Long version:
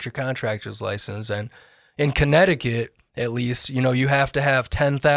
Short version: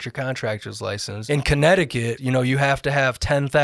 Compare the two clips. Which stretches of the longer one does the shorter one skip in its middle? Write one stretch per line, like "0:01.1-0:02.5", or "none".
0:01.1-0:01.8
0:02.9-0:03.7